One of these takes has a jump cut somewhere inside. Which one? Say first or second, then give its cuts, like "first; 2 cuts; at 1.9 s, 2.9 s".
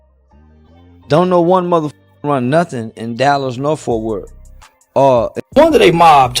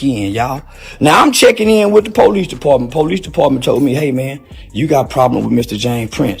first; 1 cut; at 5.4 s